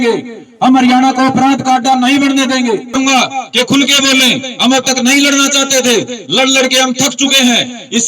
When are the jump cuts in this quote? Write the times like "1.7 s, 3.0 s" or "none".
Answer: 2.9 s